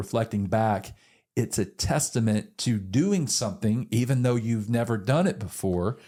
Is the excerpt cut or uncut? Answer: uncut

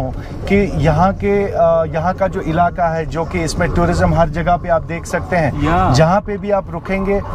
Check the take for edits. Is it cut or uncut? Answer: uncut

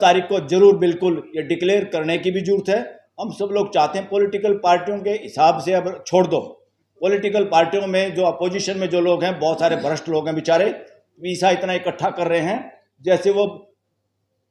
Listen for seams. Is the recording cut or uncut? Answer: uncut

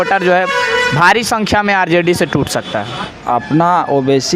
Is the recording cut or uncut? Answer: cut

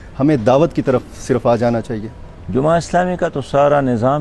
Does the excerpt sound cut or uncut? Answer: uncut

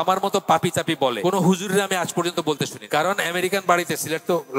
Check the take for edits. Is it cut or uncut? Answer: cut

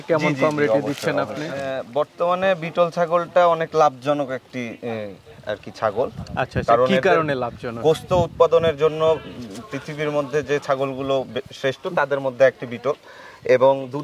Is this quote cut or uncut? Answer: cut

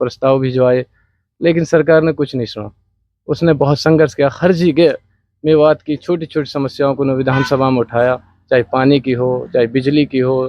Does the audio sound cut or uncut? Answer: uncut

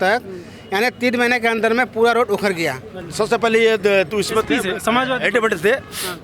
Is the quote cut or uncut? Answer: cut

